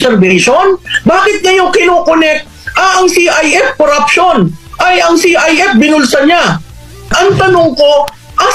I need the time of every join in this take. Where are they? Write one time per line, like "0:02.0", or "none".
0:00.9
0:07.1